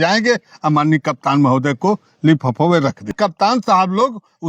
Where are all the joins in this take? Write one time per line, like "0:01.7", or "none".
0:03.1